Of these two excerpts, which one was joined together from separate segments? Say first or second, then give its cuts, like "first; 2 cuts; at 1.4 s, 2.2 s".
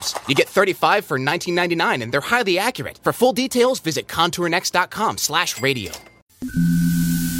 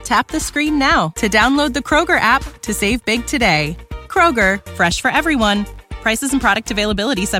first; 1 cut; at 6.4 s